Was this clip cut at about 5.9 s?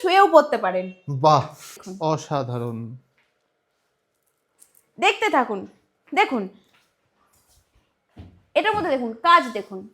no; 1 cut; at 1.7 s

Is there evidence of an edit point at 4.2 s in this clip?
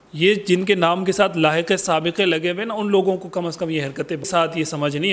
yes; 1 cut; at 4.2 s

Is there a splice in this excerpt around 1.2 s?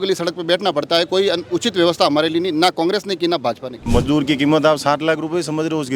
no; 1 cut; at 3.9 s

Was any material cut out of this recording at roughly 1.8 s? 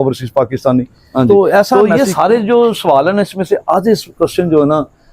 yes; 1 cut; at 1.8 s

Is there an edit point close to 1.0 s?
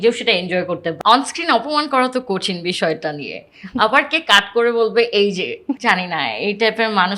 yes; 2 cuts; at 1.0 s, 5.6 s

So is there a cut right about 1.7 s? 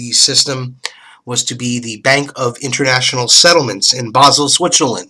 yes; 1 cut; at 1.7 s

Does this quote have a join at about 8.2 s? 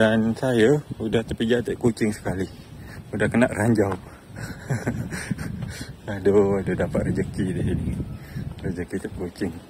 no; 0 cuts

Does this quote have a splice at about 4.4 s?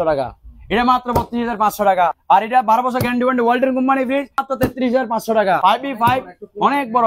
yes; 3 cuts; at 2.2 s, 4.4 s, 5.6 s

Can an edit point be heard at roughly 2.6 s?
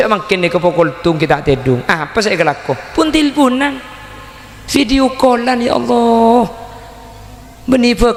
no; 0 cuts

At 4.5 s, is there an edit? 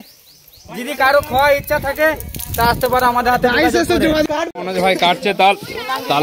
yes; 1 cut; at 4.5 s

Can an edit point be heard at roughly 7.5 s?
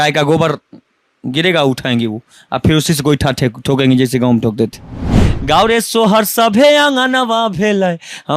no; 1 cut; at 5.1 s

